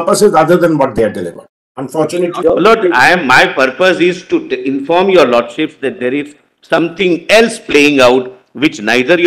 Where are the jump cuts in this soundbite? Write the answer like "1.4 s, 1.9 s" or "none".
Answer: 2.4 s